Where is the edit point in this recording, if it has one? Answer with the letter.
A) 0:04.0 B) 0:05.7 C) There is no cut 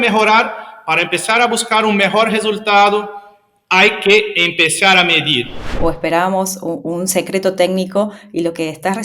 B